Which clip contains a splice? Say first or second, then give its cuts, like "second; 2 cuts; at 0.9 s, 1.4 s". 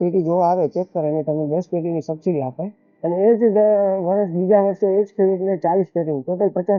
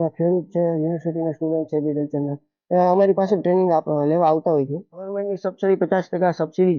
second; 1 cut; at 5.3 s